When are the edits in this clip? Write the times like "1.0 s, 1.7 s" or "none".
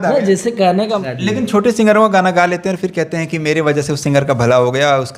1.1 s